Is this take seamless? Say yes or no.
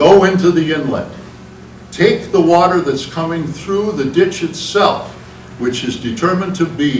yes